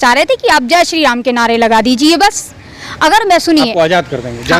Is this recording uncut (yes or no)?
yes